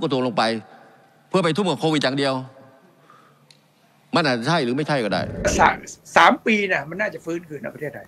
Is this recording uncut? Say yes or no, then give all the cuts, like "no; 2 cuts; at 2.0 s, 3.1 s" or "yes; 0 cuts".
no; 1 cut; at 5.5 s